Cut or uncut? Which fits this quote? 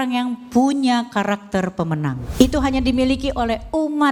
cut